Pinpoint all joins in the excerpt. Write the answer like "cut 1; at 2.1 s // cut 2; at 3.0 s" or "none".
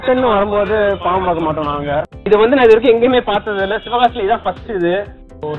cut 1; at 2.1 s